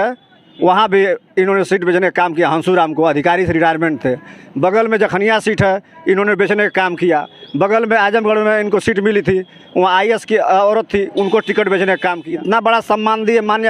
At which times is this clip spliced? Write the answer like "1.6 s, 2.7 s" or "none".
12.2 s